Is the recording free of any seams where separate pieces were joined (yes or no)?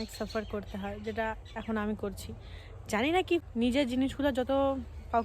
no